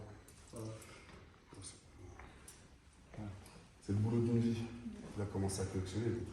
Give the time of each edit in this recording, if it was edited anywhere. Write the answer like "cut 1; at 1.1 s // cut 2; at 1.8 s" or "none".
none

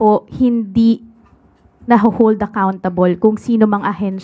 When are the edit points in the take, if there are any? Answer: none

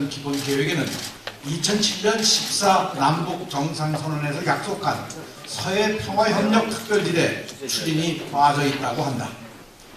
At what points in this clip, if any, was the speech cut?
none

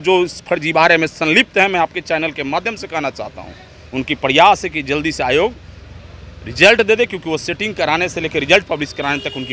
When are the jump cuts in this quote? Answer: none

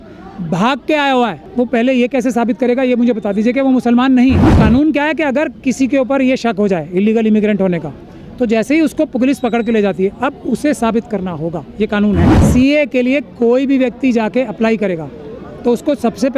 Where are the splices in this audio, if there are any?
cut 1; at 1.4 s // cut 2; at 4.5 s // cut 3; at 12.4 s

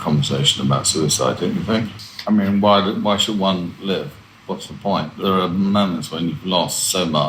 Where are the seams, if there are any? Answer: cut 1; at 1.9 s // cut 2; at 5.1 s

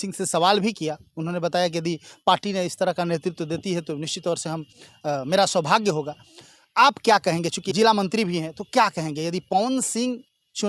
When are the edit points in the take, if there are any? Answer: none

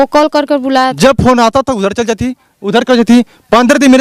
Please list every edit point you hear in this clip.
cut 1; at 1.0 s

